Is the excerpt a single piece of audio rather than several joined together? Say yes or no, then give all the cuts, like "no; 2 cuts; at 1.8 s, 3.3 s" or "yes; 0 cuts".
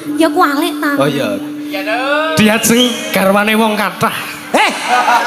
yes; 0 cuts